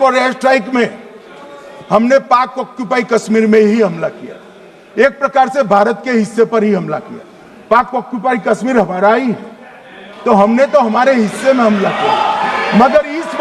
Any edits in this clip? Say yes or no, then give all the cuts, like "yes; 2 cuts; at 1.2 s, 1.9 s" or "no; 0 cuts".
no; 0 cuts